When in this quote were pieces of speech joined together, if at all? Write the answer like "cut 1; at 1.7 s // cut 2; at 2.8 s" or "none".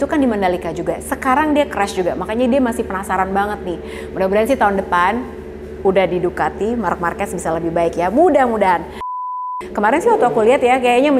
cut 1; at 9.2 s